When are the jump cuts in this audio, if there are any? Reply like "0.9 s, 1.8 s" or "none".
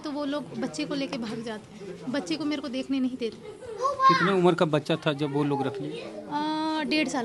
none

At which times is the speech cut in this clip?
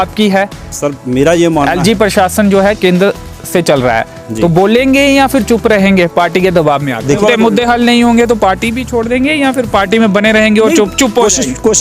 7.2 s

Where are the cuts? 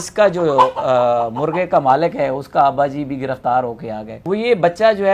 4.1 s

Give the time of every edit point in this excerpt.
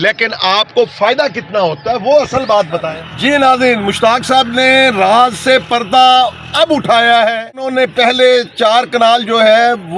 2.8 s, 7.7 s

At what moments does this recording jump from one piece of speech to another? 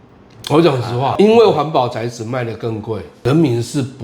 1.1 s, 3.1 s

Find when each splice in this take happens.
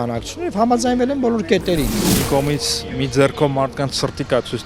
2.0 s

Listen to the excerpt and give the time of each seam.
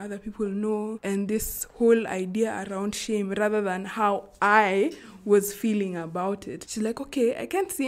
1.0 s, 6.6 s

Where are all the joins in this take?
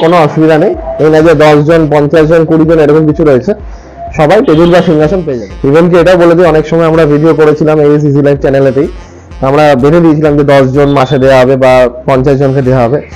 5.3 s

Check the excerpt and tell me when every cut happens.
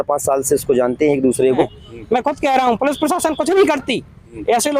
1.8 s

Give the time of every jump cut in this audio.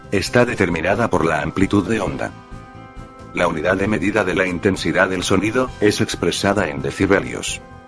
none

